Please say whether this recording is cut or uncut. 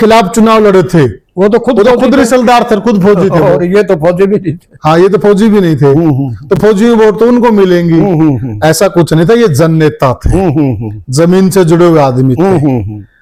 uncut